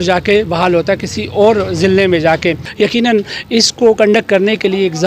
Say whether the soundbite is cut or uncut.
cut